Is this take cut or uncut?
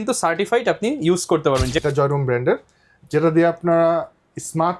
cut